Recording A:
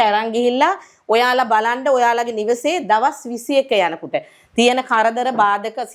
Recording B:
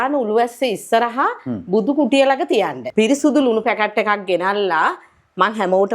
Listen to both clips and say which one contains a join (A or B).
B